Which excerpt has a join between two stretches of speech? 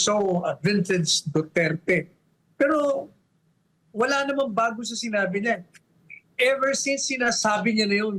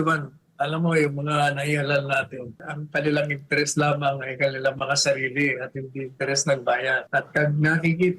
second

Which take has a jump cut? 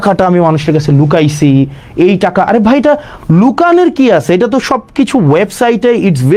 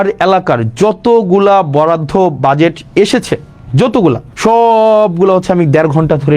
second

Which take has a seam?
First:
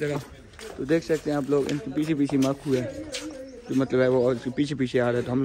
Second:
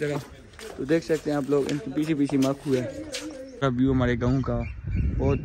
second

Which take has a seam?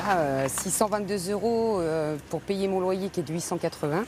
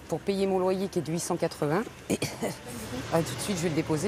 second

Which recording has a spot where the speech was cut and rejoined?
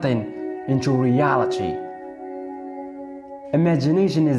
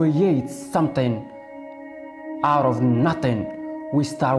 first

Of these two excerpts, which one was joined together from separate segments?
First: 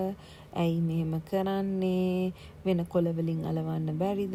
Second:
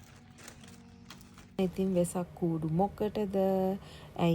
second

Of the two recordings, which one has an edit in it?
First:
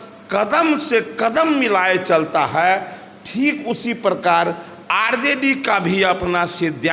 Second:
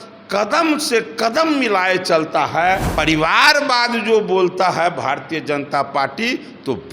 second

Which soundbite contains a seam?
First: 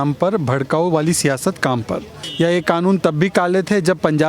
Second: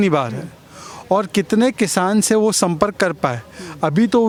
first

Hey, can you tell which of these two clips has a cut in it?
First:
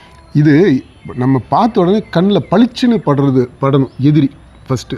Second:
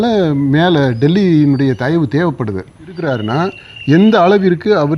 second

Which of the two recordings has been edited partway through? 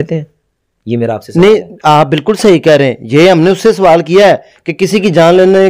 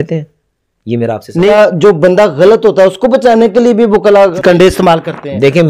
second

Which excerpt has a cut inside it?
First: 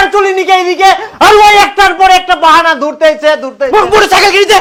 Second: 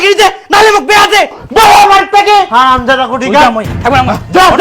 second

